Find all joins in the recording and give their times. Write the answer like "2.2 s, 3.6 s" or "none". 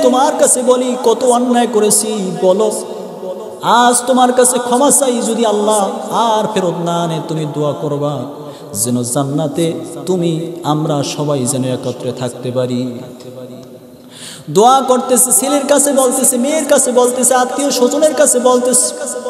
none